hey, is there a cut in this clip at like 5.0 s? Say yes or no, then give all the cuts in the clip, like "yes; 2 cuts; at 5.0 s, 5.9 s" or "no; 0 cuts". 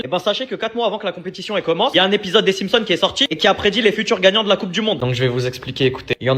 yes; 1 cut; at 5.0 s